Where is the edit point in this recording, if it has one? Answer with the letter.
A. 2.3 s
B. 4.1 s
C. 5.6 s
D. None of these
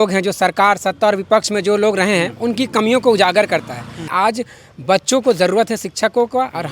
B